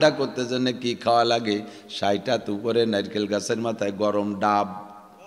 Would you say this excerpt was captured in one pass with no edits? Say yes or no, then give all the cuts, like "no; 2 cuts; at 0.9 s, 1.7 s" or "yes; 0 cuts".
yes; 0 cuts